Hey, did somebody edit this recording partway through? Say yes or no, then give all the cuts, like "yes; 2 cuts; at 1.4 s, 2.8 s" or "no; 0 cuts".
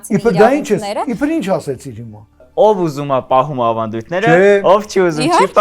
yes; 1 cut; at 2.4 s